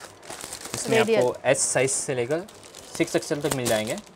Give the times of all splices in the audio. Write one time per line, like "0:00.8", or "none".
none